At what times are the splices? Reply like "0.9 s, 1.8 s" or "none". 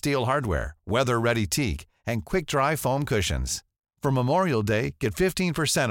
none

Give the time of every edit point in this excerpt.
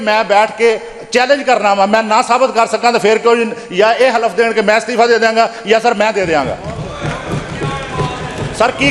none

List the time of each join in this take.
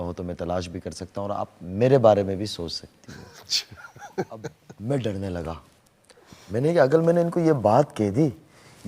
4.7 s

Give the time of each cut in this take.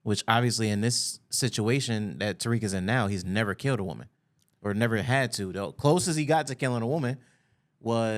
none

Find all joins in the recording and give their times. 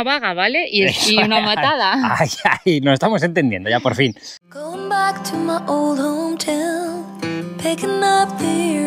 4.4 s

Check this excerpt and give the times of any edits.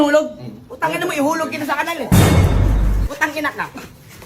3.0 s

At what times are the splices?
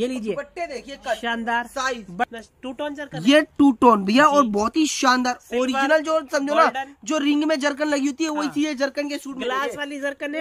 2.3 s

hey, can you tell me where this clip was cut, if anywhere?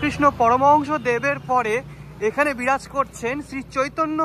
none

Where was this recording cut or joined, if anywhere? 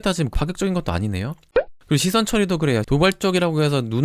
1.5 s, 2.8 s

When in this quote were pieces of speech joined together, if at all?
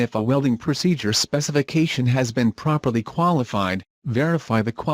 3.5 s

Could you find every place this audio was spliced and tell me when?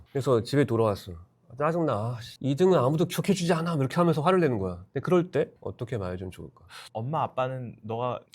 6.8 s

